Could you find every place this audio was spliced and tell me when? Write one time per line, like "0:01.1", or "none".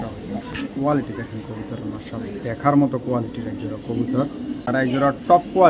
0:04.7

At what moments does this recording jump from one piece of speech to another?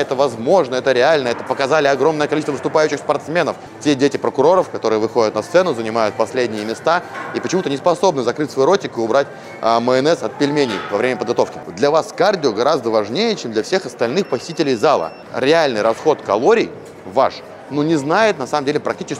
0:03.7
0:11.6
0:15.2

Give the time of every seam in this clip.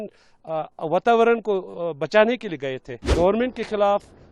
0:03.0

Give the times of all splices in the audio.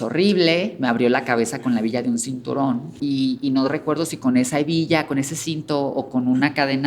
0:02.9

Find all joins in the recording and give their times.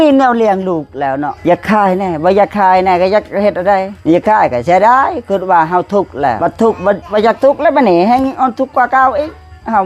0:01.3
0:03.9
0:06.4
0:07.0

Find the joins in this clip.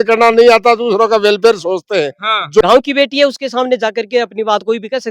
0:02.6

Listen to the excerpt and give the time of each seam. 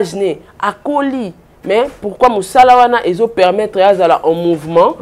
none

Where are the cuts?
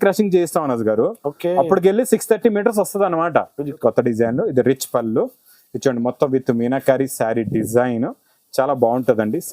0:03.8

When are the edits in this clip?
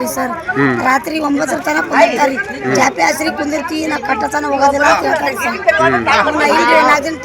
none

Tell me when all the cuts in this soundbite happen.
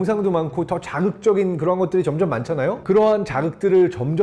0:02.8

